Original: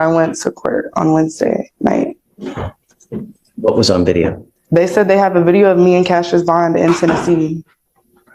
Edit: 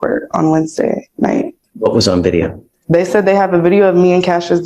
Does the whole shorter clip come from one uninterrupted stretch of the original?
no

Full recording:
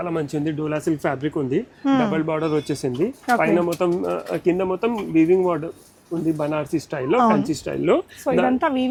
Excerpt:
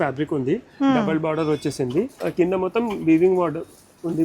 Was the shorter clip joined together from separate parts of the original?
yes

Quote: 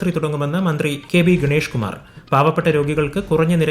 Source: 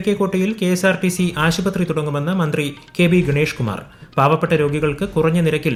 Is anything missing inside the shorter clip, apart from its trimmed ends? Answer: yes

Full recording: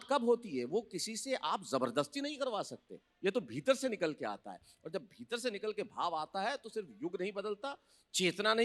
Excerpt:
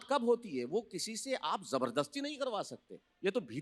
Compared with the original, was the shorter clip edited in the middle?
no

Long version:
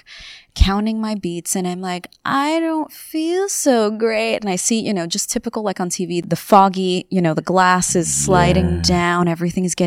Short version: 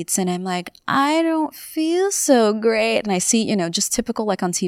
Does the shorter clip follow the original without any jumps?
yes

